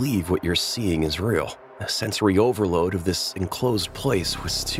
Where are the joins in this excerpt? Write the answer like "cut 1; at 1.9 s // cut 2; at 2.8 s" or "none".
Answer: none